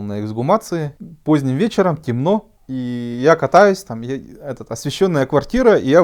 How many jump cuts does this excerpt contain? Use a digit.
2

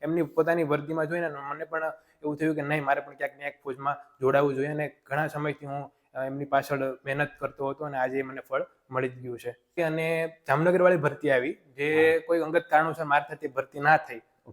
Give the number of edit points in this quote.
1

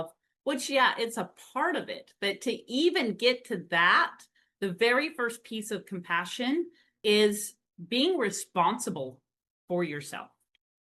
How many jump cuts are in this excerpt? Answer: 1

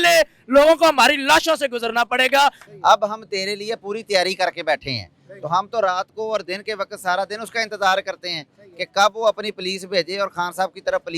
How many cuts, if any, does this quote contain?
1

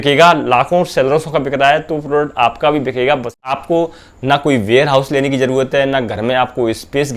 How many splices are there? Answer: 1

